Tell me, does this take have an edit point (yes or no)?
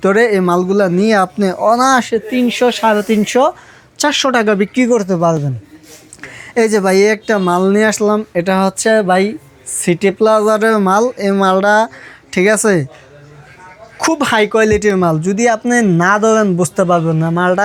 no